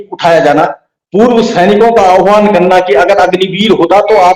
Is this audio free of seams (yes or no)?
yes